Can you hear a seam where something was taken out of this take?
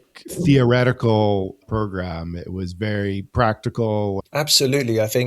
yes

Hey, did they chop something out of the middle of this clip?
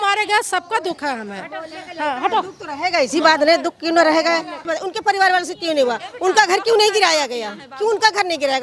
yes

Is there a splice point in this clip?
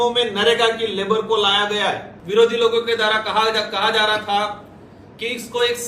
yes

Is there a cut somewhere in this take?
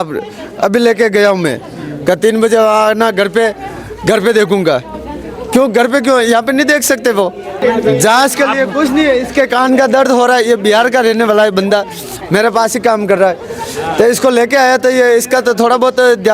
no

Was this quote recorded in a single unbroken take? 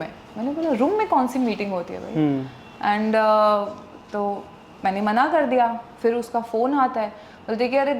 yes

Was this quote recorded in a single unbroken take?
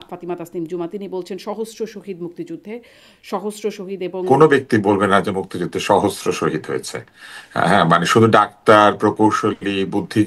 no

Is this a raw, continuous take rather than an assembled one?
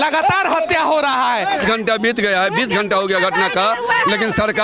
no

